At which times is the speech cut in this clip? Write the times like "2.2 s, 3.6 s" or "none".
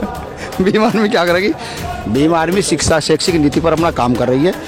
none